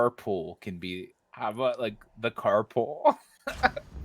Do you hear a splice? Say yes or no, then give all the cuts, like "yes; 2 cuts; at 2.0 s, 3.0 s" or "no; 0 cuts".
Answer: no; 0 cuts